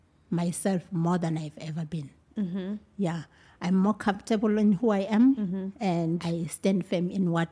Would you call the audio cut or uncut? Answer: cut